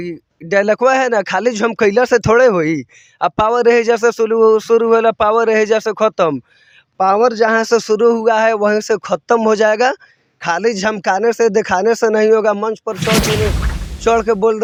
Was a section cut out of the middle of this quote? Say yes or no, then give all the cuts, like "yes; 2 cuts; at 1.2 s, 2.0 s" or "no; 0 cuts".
no; 0 cuts